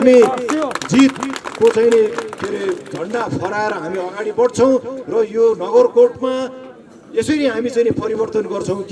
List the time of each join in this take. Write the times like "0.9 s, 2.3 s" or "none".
none